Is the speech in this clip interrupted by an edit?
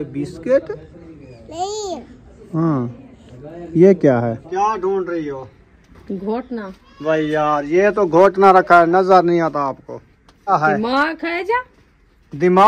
yes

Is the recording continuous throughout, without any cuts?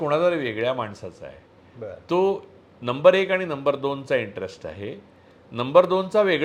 yes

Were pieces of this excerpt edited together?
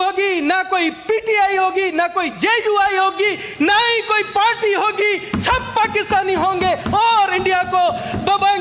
no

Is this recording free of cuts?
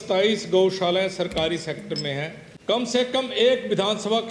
no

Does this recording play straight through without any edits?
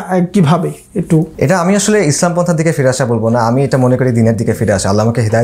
no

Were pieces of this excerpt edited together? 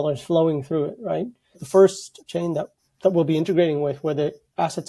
yes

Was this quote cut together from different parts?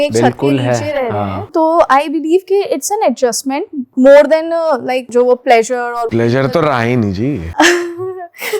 yes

